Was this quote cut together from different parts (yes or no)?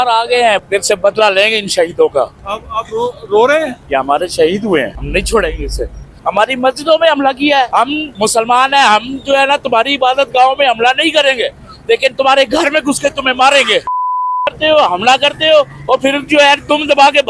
yes